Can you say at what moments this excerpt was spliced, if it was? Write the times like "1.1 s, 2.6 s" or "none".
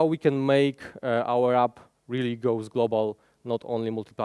none